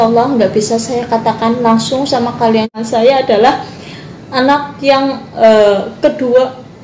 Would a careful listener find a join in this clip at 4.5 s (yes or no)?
no